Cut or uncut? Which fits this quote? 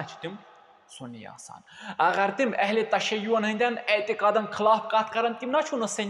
uncut